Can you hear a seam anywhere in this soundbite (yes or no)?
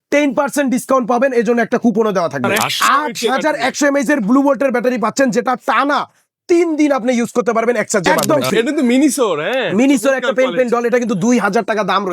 yes